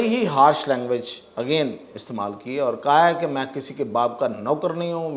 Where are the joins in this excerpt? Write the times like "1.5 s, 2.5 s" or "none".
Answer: none